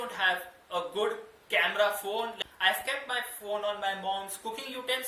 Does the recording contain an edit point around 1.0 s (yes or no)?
no